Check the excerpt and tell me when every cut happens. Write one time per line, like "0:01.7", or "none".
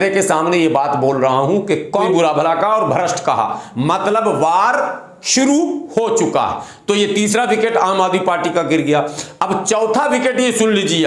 0:02.0